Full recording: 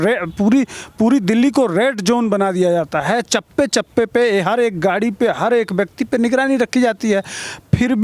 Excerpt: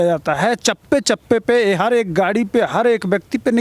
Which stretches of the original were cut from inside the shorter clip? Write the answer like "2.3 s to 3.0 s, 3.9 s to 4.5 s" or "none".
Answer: none